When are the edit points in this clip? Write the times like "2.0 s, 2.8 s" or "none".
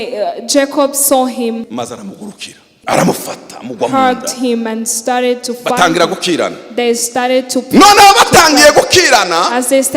1.7 s, 2.7 s

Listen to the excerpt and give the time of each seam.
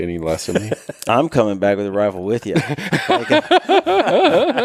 none

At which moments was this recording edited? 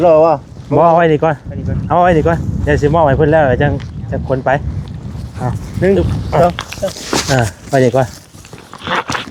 none

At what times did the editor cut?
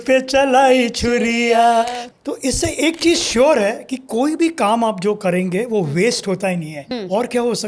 2.1 s, 6.8 s

